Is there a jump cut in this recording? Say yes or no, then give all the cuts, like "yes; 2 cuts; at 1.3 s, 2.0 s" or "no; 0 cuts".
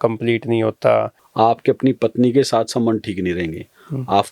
yes; 1 cut; at 1.2 s